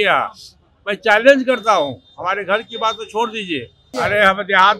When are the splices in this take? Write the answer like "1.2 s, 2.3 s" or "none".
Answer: 3.9 s